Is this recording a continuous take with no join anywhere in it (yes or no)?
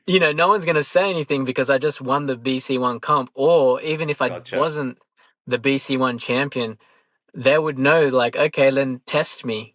yes